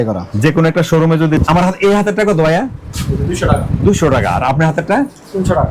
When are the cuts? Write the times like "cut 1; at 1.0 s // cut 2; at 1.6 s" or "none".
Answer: cut 1; at 1.4 s